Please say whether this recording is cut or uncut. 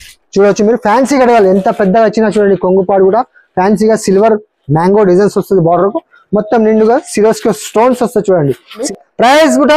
cut